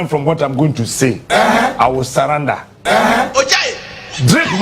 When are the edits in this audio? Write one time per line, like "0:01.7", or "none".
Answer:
0:03.3